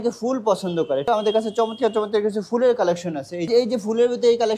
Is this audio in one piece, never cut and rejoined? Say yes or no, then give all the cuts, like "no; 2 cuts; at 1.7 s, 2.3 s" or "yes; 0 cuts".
no; 2 cuts; at 1.1 s, 3.5 s